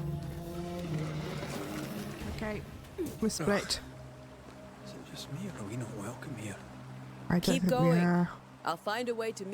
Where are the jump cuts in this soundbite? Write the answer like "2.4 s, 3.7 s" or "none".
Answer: 2.8 s